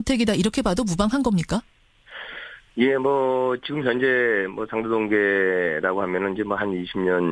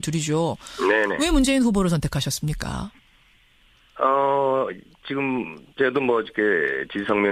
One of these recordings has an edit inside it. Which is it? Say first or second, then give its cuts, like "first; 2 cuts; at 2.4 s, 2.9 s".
first; 1 cut; at 6.0 s